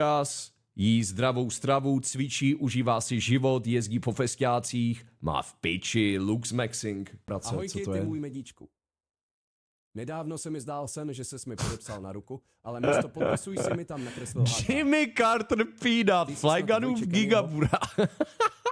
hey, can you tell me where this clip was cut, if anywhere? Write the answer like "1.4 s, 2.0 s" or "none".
7.2 s